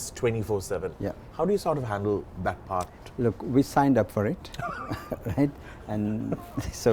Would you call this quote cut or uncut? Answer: uncut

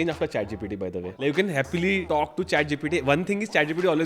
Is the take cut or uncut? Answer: cut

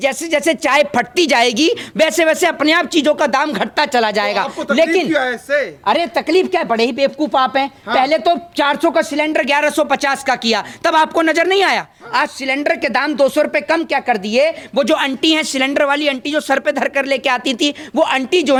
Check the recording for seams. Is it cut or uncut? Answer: uncut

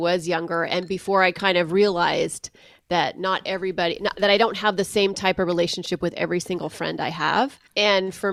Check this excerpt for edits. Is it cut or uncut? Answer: uncut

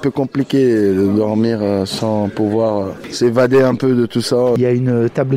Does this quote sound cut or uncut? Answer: cut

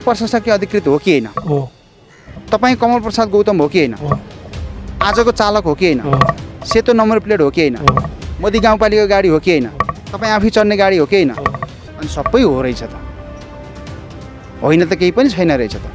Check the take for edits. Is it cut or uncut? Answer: uncut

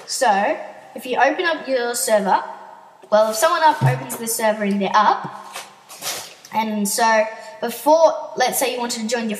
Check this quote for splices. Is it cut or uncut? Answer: uncut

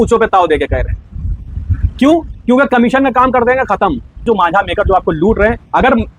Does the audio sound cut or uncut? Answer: cut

